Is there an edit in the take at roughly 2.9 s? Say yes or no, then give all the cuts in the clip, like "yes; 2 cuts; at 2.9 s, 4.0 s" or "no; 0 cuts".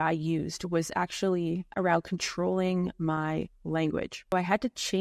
no; 2 cuts; at 1.7 s, 4.3 s